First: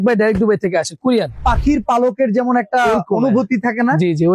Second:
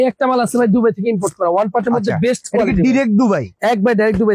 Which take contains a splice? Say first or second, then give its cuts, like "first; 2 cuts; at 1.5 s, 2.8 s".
first; 1 cut; at 1.5 s